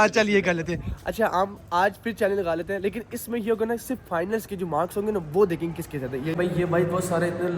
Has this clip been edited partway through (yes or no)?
yes